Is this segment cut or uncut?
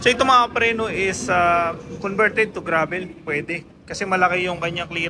uncut